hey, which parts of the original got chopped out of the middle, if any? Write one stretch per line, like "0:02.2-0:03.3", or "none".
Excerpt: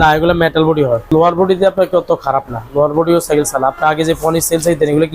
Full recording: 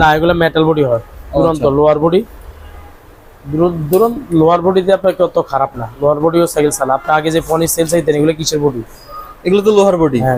0:01.1-0:04.3